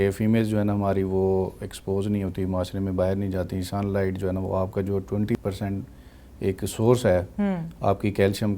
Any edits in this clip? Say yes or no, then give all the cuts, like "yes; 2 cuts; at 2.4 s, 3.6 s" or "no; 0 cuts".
yes; 1 cut; at 5.4 s